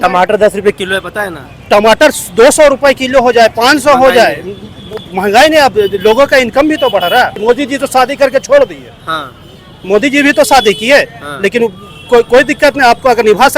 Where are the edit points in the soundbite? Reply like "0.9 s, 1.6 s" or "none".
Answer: 7.4 s